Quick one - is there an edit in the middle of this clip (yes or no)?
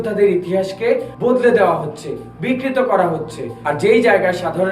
yes